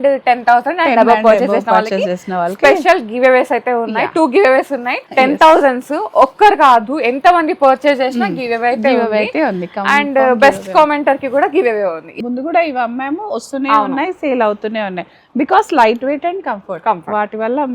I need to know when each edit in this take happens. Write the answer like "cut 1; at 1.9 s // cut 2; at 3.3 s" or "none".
cut 1; at 5.1 s // cut 2; at 12.1 s

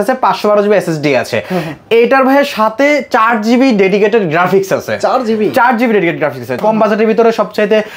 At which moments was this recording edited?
cut 1; at 6.5 s

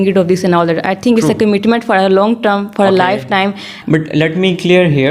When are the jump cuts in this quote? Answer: cut 1; at 3.7 s

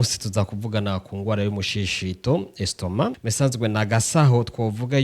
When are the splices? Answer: cut 1; at 3.2 s

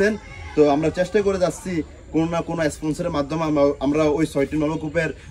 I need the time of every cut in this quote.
none

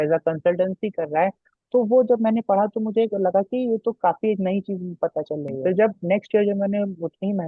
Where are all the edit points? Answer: cut 1; at 5.5 s

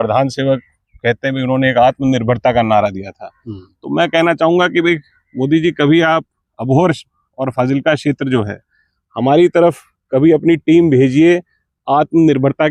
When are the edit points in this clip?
none

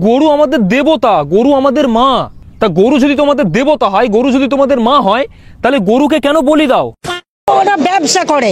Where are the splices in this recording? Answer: cut 1; at 7.4 s

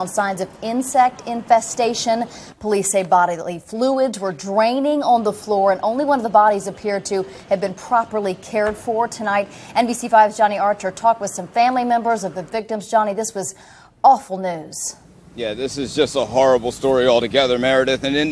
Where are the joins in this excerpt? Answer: none

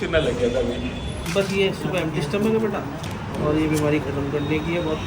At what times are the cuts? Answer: cut 1; at 1.2 s

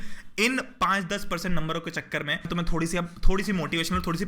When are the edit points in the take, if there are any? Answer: cut 1; at 2.5 s

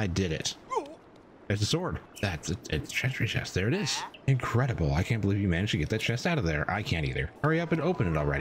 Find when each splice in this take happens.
cut 1; at 2.1 s // cut 2; at 4.1 s // cut 3; at 7.3 s

